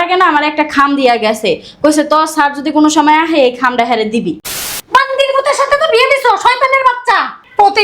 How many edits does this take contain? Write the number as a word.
one